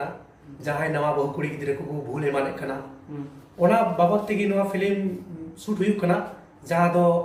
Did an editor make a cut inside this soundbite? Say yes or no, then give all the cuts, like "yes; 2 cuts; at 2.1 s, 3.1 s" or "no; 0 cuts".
no; 0 cuts